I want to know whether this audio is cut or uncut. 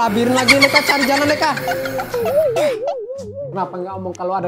uncut